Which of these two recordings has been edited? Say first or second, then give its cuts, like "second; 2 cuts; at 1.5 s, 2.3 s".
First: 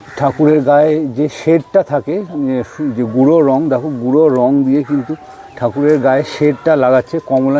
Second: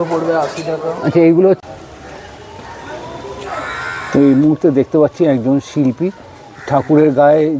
second; 1 cut; at 1.6 s